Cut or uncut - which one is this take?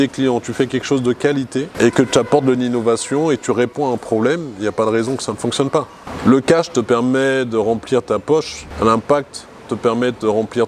cut